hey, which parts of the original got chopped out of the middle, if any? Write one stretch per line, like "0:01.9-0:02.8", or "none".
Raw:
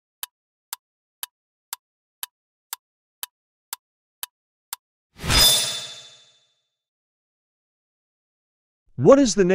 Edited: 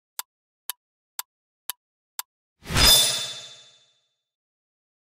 0:03.9-0:04.9